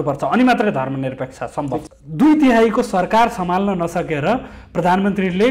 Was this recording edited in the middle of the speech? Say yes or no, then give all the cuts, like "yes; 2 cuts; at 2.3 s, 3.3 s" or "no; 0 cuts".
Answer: yes; 1 cut; at 1.9 s